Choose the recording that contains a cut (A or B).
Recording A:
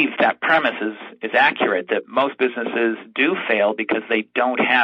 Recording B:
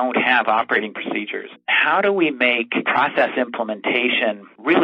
B